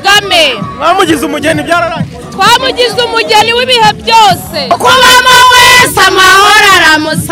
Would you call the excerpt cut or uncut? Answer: cut